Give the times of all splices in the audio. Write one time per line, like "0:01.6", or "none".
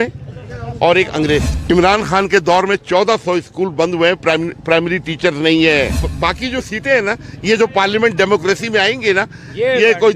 0:01.5
0:06.0